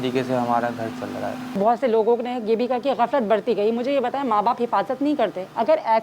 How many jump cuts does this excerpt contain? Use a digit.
1